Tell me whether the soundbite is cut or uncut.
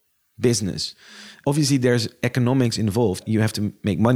cut